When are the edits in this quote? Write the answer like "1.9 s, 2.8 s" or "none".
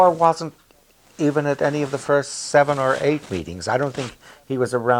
none